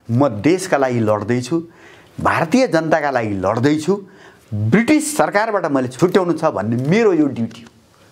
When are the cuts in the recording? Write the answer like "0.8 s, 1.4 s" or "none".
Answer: 5.9 s